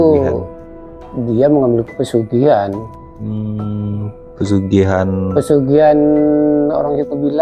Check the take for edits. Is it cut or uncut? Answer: uncut